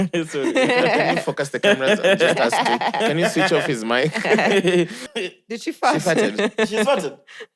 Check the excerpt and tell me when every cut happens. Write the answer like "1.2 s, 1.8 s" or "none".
5.0 s